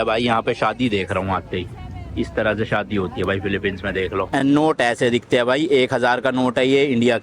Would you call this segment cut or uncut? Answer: cut